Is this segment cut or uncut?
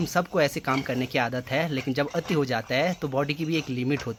uncut